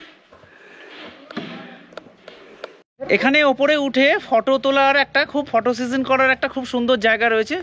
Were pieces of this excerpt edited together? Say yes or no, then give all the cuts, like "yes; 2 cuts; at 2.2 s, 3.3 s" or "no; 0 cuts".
yes; 1 cut; at 2.7 s